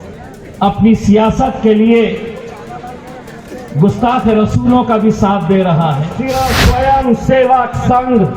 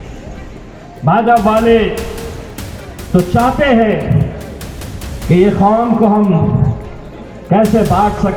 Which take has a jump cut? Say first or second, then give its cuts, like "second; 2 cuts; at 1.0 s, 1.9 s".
first; 1 cut; at 6.1 s